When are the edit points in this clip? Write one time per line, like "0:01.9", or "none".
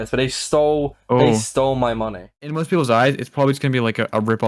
0:02.5

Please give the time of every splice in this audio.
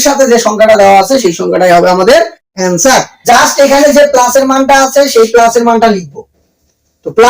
0:03.1

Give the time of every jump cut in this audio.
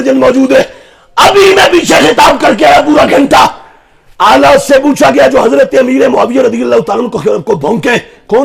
none

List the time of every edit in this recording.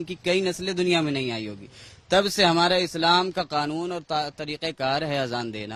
none

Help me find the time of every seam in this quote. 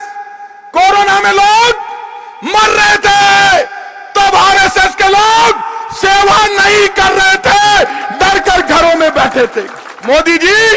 0:09.9

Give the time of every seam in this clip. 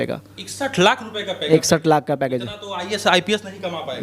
0:01.5

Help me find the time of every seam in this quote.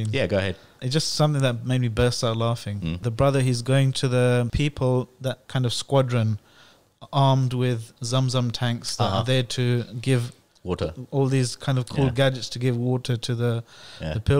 0:00.8
0:03.0
0:04.5
0:05.4

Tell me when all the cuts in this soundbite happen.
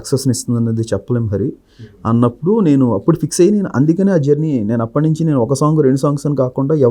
none

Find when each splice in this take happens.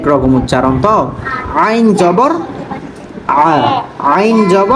none

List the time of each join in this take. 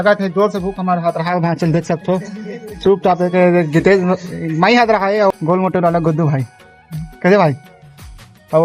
0:03.2
0:05.3
0:07.1

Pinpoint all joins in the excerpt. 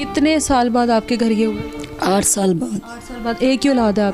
none

